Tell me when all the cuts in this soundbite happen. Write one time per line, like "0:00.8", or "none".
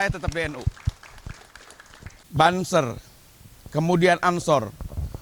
0:02.2